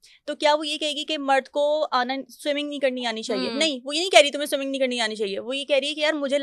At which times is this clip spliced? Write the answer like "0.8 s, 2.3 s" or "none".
none